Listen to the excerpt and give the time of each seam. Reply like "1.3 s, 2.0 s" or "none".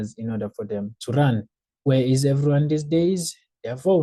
none